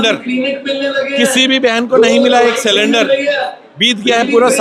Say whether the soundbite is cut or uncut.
uncut